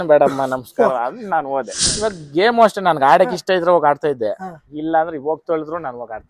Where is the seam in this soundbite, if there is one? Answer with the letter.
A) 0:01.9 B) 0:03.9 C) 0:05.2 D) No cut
A